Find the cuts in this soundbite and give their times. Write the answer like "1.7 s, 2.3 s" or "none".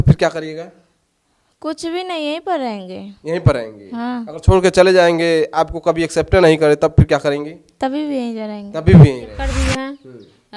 9.4 s